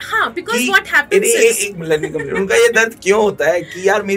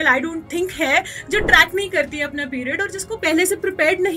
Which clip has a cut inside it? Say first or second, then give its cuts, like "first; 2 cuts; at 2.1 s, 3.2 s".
second; 1 cut; at 3.1 s